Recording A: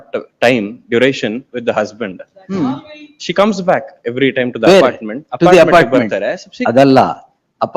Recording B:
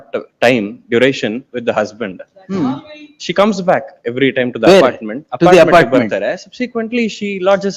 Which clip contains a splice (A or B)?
A